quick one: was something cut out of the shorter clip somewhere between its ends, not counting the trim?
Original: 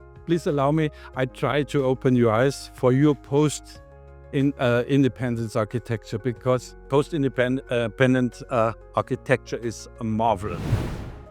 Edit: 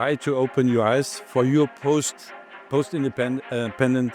yes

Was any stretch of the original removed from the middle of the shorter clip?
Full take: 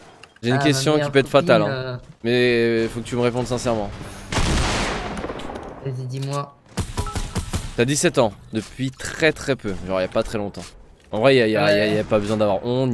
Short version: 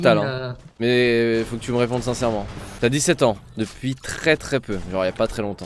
yes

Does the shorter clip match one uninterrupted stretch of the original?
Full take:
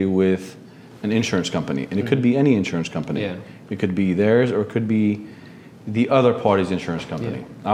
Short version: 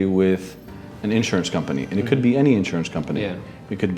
yes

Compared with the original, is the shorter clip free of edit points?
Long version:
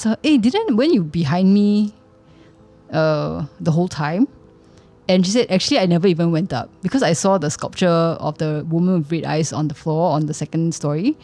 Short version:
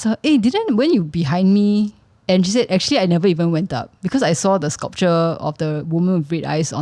no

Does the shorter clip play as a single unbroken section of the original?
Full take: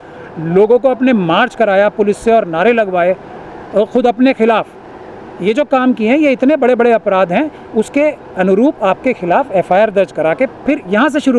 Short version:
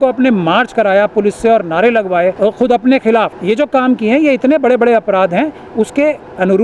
no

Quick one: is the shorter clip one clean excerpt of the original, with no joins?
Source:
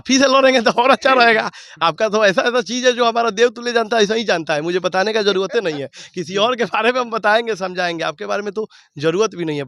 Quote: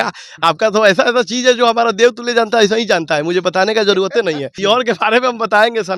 no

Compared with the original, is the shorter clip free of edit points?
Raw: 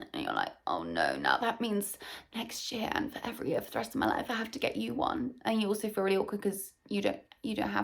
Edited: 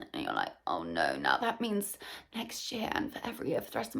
yes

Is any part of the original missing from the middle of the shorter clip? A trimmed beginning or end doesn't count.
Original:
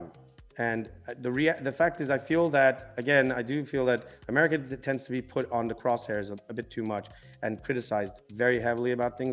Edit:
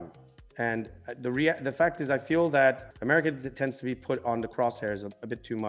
yes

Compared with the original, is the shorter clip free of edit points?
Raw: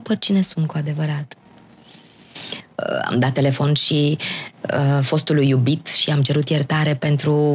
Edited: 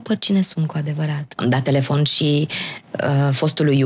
no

